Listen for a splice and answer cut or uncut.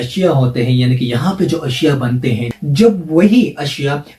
cut